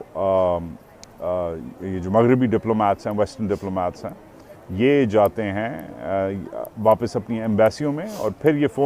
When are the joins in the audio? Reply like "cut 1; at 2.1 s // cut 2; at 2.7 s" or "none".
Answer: none